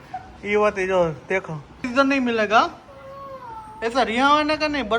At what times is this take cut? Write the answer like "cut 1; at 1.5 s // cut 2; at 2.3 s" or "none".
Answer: cut 1; at 1.8 s